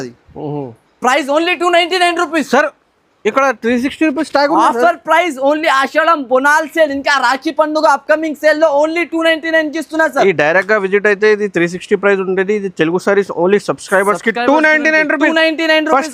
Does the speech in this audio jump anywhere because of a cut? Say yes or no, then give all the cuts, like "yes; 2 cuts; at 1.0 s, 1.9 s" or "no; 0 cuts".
no; 0 cuts